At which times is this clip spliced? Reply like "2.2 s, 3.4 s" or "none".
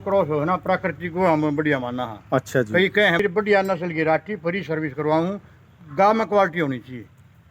3.2 s